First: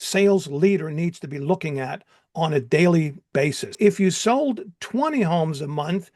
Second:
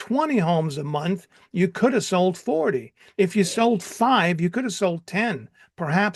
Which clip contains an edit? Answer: first; 1 cut; at 3.8 s

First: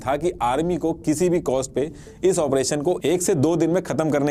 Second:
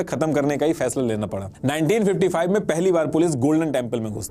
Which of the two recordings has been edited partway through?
second; 1 cut; at 1.5 s

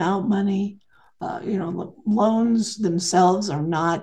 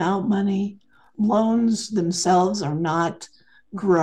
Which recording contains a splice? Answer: second; 1 cut; at 1.0 s

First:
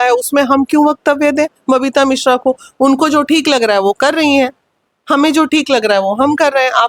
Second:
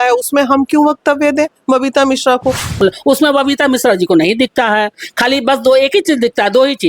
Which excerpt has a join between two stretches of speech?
second; 1 cut; at 2.8 s

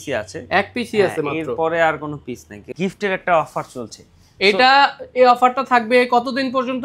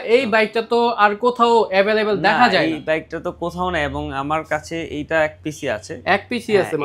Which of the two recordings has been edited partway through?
first; 1 cut; at 2.7 s

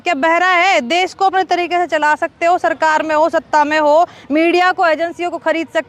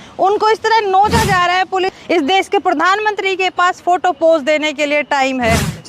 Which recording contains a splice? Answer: second; 1 cut; at 1.9 s

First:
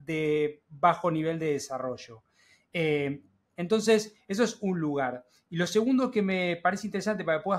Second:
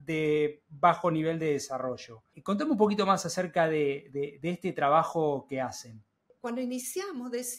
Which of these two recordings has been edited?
second; 2 cuts; at 2.3 s, 6.3 s

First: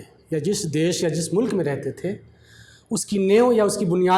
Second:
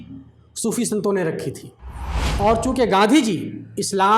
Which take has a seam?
second; 1 cut; at 2.2 s

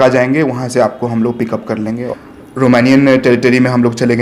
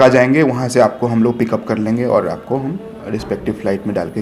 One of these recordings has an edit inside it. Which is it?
first; 1 cut; at 2.0 s

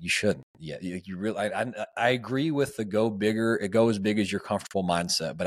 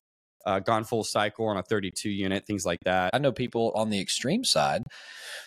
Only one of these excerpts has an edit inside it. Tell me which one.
second; 1 cut; at 3.1 s

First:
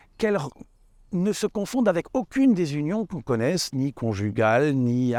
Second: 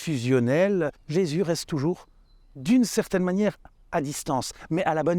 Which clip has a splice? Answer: second; 1 cut; at 1.0 s

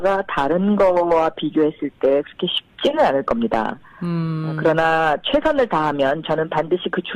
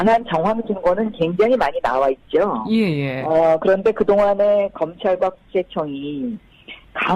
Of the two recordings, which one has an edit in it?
second; 1 cut; at 2.7 s

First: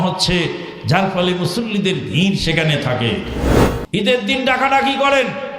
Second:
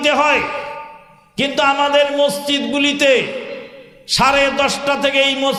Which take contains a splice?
first; 1 cut; at 3.4 s

